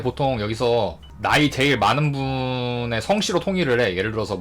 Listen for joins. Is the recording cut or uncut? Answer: cut